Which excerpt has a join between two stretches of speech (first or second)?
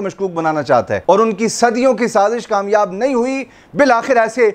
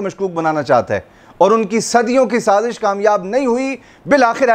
first